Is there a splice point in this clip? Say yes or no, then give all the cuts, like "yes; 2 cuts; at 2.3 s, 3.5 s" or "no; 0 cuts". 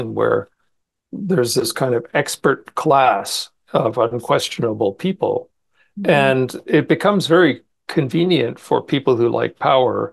no; 0 cuts